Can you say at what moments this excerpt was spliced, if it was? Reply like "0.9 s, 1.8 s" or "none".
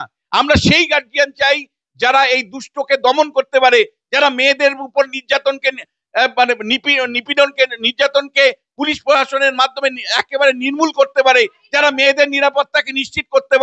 none